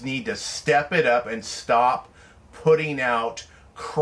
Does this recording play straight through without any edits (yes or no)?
yes